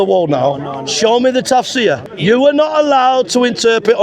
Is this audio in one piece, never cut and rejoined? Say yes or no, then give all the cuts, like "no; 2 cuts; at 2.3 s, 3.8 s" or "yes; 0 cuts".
no; 1 cut; at 2.1 s